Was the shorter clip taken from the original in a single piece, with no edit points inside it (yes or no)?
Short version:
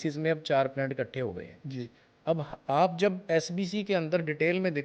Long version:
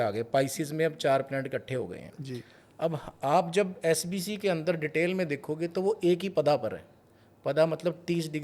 yes